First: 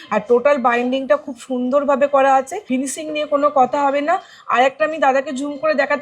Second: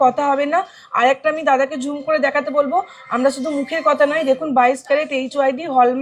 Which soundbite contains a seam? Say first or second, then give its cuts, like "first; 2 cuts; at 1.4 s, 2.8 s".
first; 1 cut; at 2.6 s